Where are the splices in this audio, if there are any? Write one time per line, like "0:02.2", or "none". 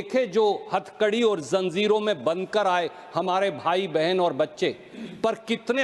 none